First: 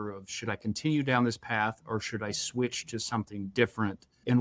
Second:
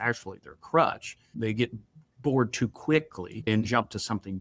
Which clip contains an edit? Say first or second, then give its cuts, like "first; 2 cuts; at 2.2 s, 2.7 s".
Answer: second; 2 cuts; at 1.3 s, 3.5 s